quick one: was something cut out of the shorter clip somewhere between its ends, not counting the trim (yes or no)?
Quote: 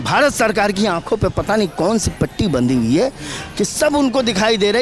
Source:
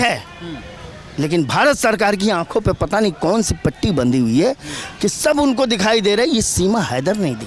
no